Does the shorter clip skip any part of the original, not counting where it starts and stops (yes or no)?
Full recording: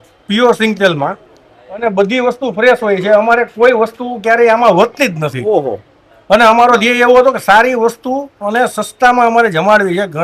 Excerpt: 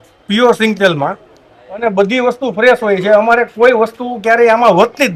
no